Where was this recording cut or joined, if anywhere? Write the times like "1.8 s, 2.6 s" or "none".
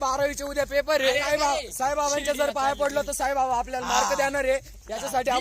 1.1 s